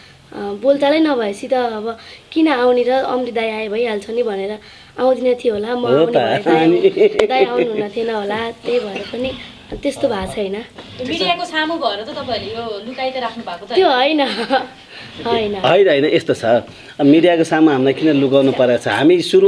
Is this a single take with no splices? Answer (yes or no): yes